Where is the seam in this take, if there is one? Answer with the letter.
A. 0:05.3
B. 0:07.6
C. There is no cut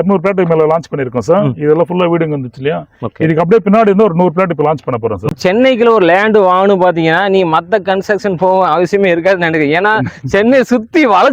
A